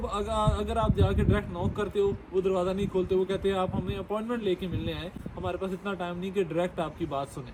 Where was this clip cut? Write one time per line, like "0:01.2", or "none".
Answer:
none